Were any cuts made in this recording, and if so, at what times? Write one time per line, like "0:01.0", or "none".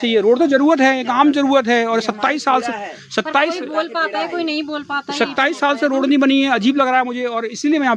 none